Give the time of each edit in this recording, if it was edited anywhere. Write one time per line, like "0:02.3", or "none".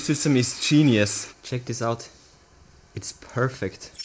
none